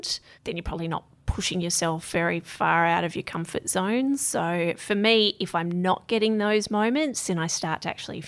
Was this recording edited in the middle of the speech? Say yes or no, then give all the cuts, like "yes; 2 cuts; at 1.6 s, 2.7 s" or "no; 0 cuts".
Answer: no; 0 cuts